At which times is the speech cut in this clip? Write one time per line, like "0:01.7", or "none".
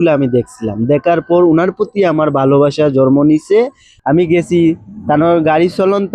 0:03.9